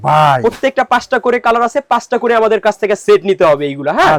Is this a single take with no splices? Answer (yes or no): yes